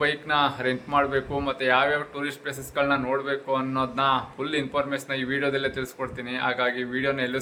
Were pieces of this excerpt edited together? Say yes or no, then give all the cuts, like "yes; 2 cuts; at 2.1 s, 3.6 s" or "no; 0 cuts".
no; 0 cuts